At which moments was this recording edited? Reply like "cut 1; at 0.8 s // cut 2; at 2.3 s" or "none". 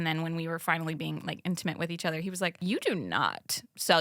cut 1; at 2.6 s